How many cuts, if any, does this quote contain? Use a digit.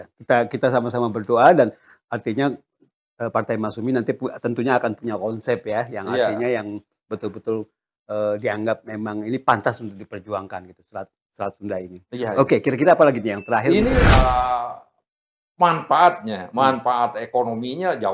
1